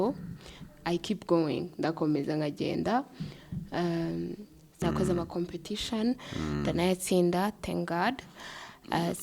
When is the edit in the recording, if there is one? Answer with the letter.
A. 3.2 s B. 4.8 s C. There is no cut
B